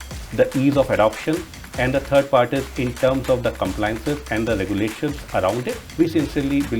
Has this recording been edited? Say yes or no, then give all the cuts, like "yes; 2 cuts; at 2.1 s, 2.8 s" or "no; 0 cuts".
yes; 1 cut; at 5.8 s